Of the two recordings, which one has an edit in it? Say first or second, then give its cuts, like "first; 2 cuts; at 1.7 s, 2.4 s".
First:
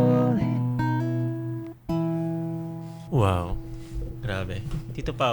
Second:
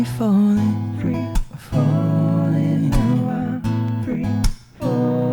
first; 1 cut; at 3.0 s